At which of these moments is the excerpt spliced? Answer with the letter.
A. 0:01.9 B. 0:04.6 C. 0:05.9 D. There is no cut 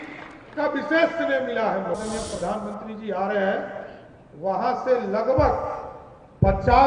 A